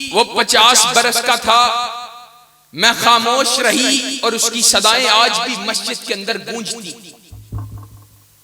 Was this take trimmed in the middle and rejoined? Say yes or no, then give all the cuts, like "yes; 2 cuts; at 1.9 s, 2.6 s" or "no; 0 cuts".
no; 0 cuts